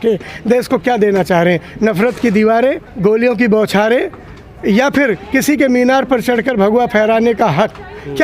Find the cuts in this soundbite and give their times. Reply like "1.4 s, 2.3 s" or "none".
2.9 s